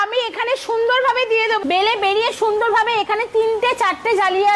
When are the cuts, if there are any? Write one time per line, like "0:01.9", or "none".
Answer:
0:01.6